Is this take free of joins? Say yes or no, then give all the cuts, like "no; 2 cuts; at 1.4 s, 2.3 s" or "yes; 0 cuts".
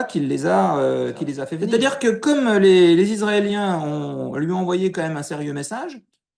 no; 1 cut; at 1.5 s